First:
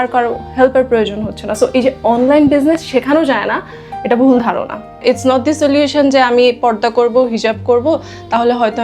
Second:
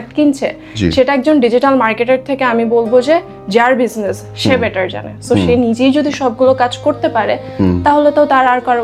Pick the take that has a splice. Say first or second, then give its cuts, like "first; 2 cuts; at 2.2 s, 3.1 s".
first; 1 cut; at 5.0 s